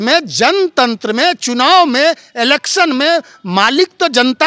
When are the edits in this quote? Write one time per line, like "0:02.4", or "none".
none